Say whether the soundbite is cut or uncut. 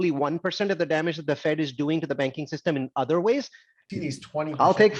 cut